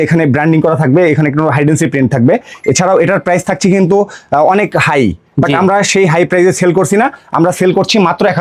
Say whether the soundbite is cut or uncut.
uncut